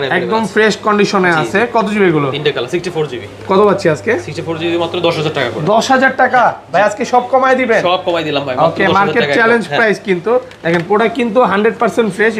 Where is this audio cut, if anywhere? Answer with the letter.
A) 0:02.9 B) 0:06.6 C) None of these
C